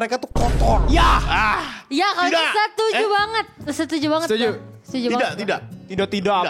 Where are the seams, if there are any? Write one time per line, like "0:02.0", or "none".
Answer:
none